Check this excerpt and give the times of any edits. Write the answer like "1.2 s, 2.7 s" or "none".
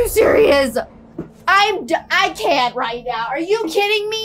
none